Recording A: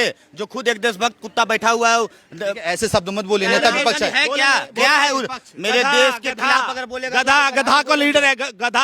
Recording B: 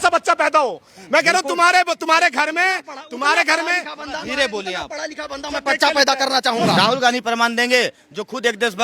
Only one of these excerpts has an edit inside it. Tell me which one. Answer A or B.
B